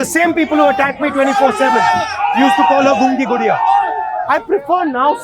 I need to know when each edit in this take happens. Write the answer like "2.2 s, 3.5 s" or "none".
4.2 s